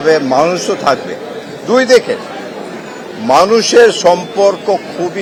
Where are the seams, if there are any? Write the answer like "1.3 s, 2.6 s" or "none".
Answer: none